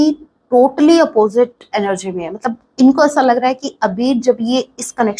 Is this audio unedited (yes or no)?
yes